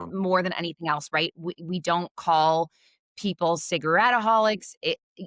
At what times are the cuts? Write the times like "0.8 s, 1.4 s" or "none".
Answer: none